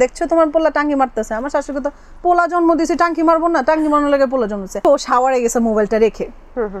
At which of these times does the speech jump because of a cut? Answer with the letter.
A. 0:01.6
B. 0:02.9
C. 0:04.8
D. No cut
C